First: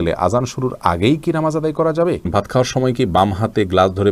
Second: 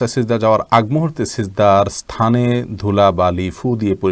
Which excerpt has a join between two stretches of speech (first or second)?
first